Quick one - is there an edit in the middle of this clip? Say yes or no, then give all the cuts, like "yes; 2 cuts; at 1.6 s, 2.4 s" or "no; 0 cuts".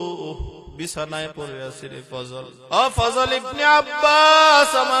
yes; 1 cut; at 2.6 s